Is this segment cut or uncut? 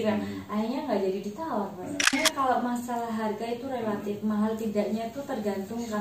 cut